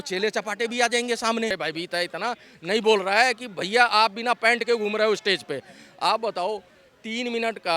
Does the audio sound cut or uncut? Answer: cut